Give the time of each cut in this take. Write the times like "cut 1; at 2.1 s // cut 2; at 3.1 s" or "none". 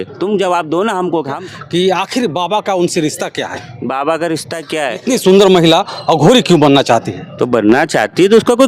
cut 1; at 1.4 s // cut 2; at 5.1 s